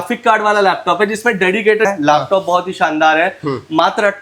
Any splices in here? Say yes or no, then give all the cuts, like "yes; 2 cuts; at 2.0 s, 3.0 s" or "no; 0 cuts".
yes; 1 cut; at 1.9 s